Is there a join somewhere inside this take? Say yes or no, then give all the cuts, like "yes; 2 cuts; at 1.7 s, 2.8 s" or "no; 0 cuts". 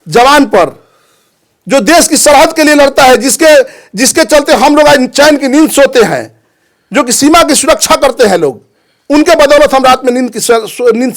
no; 0 cuts